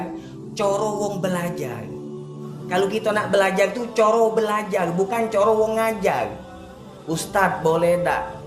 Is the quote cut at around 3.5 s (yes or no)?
no